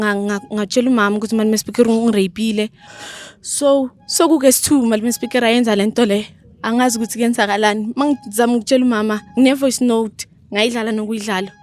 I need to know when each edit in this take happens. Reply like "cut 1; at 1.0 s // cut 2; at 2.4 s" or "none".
cut 1; at 2.8 s